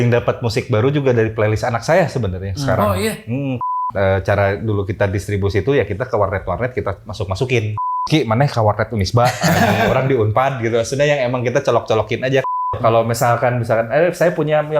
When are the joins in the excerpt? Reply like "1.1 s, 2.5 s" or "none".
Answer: 3.8 s, 7.8 s, 12.8 s